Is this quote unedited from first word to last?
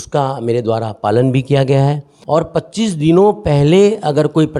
no; 1 cut; at 2.1 s

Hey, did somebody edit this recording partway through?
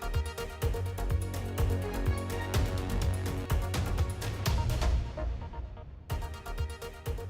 yes; 1 cut; at 6.0 s

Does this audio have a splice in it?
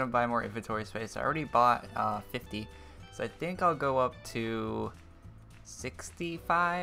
yes; 1 cut; at 2.3 s

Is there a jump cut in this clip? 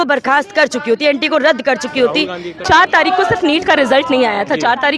yes; 1 cut; at 2.5 s

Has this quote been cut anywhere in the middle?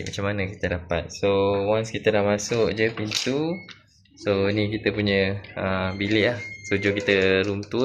no; 0 cuts

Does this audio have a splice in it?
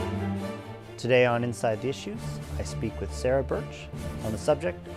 yes; 1 cut; at 3.0 s

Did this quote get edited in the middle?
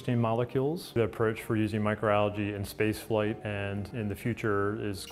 yes; 1 cut; at 0.9 s

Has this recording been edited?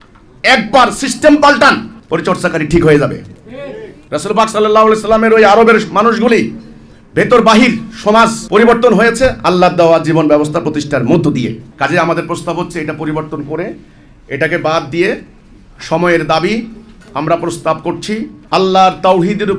yes; 2 cuts; at 1.9 s, 11.6 s

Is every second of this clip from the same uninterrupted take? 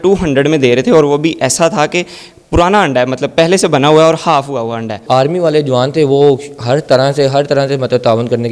no; 1 cut; at 5.0 s

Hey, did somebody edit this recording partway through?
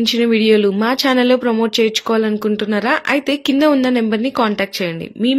no; 0 cuts

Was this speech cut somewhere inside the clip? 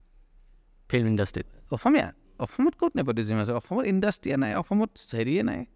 no; 0 cuts

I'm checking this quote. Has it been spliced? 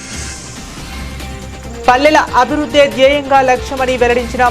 yes; 1 cut; at 1.1 s

